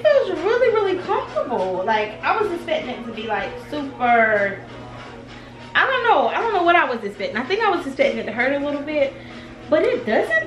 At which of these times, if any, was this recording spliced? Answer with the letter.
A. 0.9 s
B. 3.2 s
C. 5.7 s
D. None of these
D